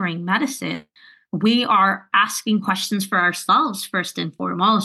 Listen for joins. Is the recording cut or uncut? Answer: uncut